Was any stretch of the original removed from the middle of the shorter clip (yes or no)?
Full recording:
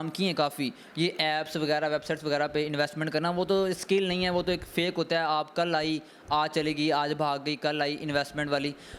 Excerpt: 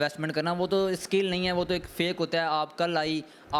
no